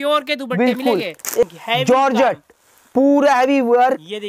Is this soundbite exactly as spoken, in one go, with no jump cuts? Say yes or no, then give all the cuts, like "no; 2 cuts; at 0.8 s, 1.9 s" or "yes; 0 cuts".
no; 1 cut; at 1.4 s